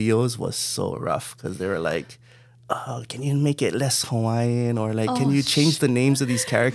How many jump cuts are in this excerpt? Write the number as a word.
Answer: zero